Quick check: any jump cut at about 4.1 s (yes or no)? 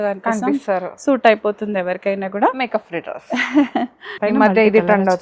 yes